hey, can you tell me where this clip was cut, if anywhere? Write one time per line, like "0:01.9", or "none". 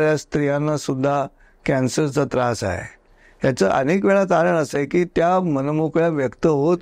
none